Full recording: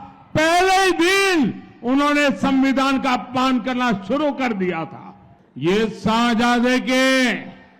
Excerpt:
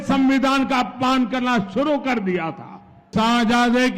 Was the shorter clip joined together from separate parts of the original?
yes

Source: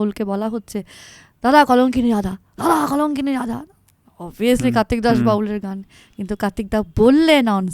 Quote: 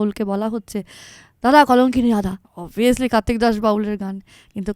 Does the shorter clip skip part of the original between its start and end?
yes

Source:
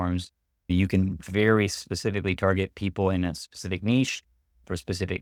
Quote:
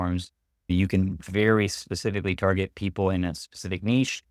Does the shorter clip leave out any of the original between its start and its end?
no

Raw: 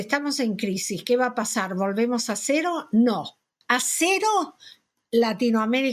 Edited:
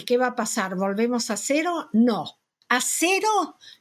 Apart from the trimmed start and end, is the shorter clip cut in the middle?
no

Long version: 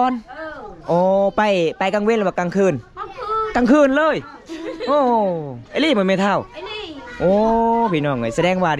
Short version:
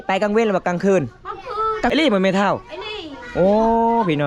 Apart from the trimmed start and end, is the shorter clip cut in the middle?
yes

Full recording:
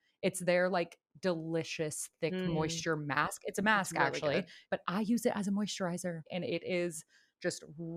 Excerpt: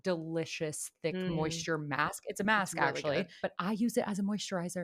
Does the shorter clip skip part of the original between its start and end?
yes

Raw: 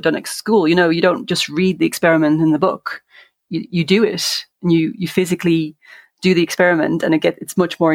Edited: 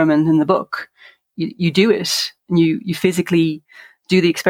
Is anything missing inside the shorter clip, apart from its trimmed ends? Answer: no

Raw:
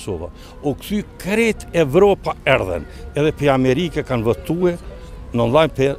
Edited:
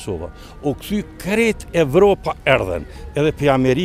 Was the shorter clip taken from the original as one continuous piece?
yes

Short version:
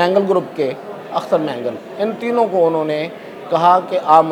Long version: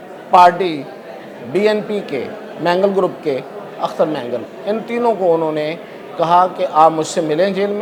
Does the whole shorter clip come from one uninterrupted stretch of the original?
yes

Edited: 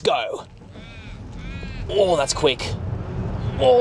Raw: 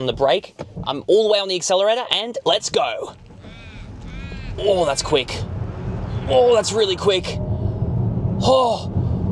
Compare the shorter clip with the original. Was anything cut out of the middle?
no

